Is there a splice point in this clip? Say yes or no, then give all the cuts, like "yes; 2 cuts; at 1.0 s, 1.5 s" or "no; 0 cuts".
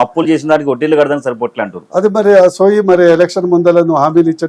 no; 0 cuts